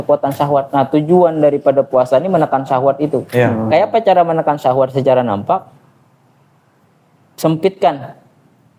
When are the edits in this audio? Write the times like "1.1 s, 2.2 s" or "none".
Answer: none